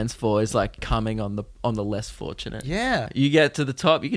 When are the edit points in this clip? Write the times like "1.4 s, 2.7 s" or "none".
0.8 s, 3.1 s